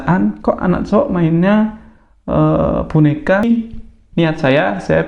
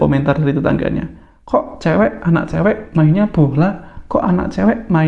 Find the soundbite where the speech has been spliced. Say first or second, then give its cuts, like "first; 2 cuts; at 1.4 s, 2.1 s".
first; 1 cut; at 3.4 s